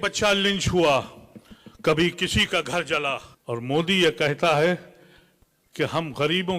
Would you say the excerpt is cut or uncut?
cut